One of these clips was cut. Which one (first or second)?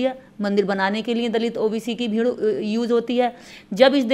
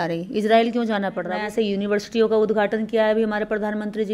second